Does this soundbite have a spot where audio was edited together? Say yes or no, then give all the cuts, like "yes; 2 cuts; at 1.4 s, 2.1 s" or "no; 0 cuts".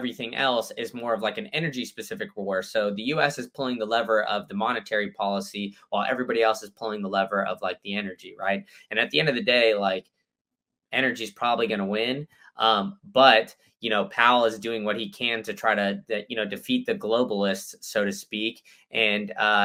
no; 0 cuts